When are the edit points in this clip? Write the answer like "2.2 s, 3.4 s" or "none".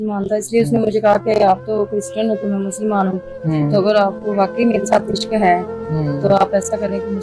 none